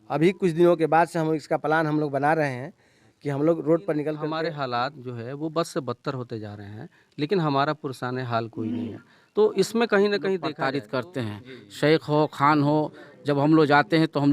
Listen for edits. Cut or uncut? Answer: cut